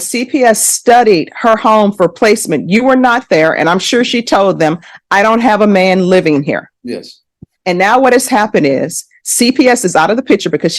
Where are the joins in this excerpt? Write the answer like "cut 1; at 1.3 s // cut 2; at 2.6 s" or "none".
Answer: cut 1; at 2.1 s